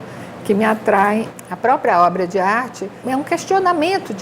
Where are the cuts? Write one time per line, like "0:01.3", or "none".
0:01.4
0:03.0